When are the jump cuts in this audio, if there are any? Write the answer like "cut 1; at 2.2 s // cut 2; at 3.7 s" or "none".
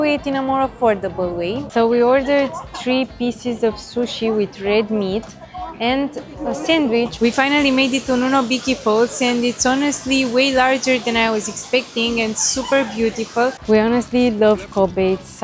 cut 1; at 1.6 s // cut 2; at 7.1 s // cut 3; at 13.6 s